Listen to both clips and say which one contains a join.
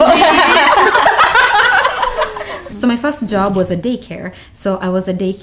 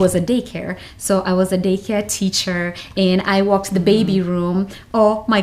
first; 1 cut; at 2.6 s

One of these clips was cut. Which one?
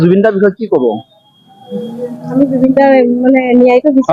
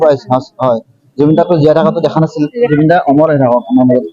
second; 1 cut; at 2.7 s

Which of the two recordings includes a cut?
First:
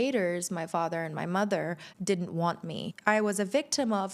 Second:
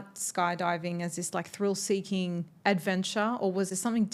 first; 1 cut; at 2.8 s

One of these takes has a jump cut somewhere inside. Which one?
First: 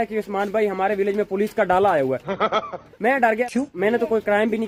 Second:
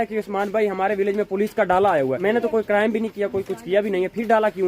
second; 1 cut; at 2.2 s

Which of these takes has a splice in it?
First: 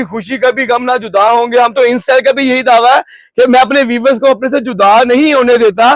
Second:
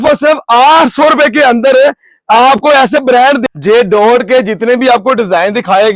second; 1 cut; at 3.4 s

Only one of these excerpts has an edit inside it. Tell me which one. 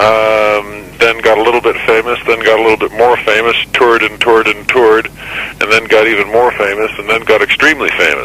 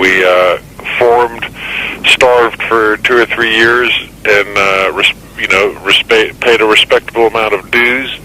second; 1 cut; at 7.3 s

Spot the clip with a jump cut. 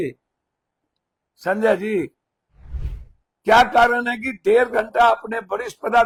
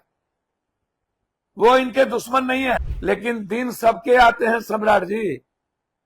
second; 1 cut; at 2.9 s

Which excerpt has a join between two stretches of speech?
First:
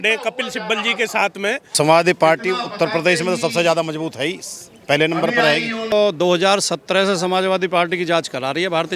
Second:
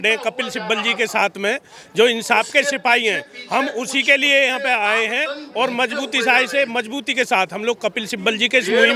first; 2 cuts; at 1.7 s, 5.9 s

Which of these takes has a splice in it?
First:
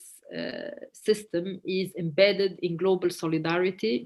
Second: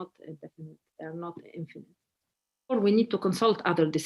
second; 1 cut; at 2.7 s

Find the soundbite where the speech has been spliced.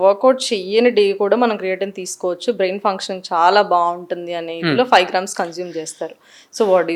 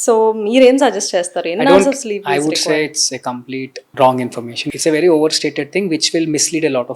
second; 2 cuts; at 3.8 s, 4.7 s

